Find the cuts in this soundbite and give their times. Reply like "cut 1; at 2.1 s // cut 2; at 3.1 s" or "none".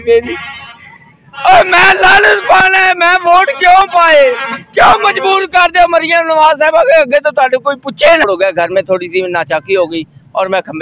cut 1; at 8.2 s

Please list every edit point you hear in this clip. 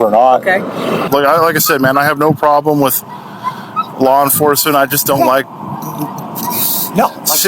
cut 1; at 1.1 s

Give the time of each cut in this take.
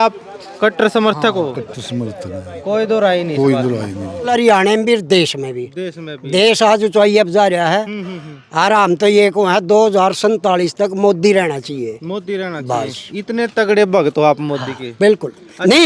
cut 1; at 4.3 s

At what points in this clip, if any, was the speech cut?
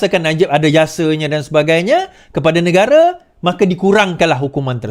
none

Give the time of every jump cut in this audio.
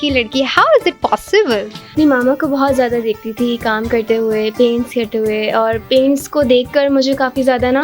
cut 1; at 1.9 s

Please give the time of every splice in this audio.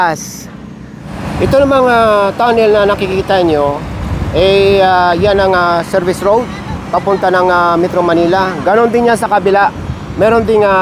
cut 1; at 1.1 s

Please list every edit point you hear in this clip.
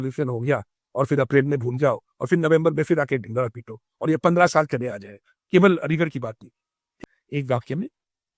cut 1; at 6.9 s

